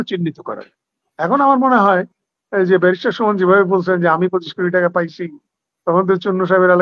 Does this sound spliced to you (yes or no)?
no